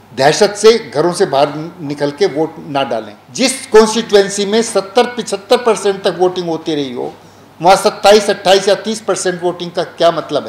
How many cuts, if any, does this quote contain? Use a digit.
1